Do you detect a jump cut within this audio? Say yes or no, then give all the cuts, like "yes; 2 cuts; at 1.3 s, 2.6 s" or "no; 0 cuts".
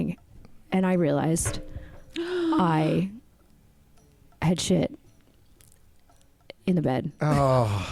no; 0 cuts